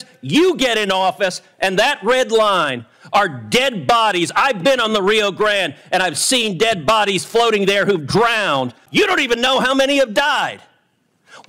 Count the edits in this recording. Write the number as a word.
one